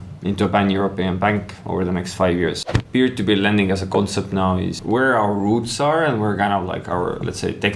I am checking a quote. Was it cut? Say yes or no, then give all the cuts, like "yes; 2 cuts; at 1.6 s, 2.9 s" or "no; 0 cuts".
yes; 2 cuts; at 2.6 s, 4.8 s